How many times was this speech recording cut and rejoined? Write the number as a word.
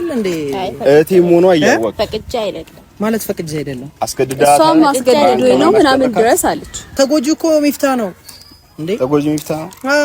one